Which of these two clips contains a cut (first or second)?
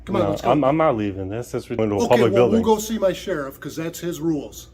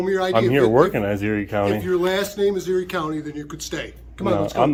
first